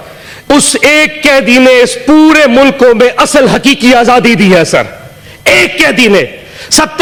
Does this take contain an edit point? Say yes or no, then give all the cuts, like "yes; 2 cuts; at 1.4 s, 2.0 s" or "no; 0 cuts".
no; 0 cuts